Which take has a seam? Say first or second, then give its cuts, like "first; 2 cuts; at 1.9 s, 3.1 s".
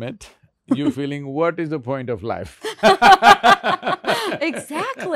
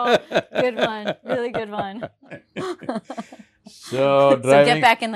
second; 1 cut; at 2.2 s